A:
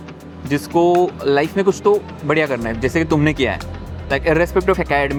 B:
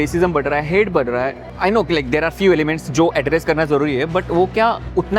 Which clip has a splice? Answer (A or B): B